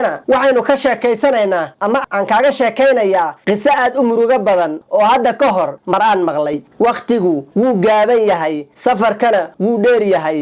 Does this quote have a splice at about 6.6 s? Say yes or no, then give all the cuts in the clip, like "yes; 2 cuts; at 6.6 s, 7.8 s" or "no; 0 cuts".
yes; 1 cut; at 6.6 s